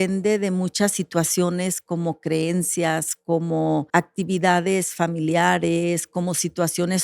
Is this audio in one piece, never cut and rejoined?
no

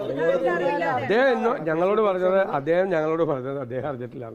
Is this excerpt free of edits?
yes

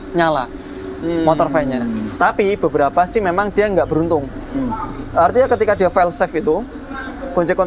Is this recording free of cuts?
yes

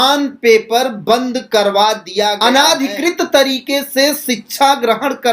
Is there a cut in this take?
yes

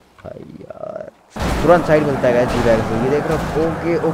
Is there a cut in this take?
yes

